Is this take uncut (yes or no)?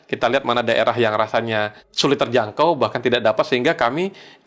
no